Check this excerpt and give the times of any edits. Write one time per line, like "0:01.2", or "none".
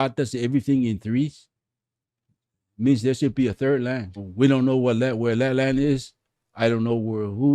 0:04.1